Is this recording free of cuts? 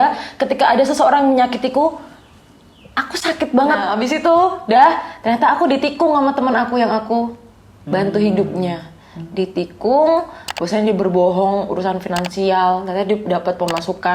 no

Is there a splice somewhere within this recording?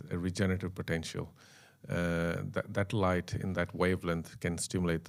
no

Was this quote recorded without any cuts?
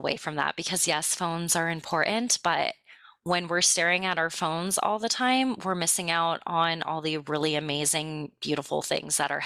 yes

